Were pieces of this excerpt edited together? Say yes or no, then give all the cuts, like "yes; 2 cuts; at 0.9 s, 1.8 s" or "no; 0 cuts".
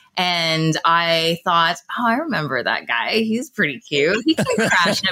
no; 0 cuts